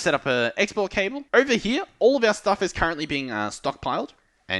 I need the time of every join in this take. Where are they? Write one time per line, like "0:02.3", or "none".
0:01.2